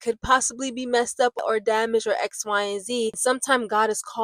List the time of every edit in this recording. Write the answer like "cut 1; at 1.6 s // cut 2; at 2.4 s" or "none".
cut 1; at 1.4 s // cut 2; at 3.2 s